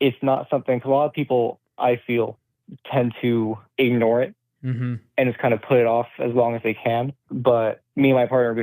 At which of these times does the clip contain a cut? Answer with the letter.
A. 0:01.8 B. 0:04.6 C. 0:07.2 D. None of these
C